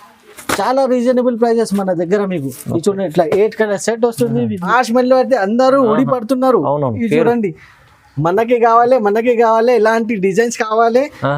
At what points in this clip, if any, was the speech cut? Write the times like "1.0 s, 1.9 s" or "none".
4.7 s